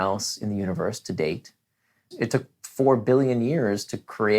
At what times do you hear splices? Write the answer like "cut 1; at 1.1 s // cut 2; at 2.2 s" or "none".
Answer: cut 1; at 2.0 s